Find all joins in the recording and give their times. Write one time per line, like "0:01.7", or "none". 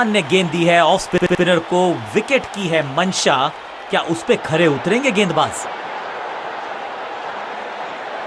none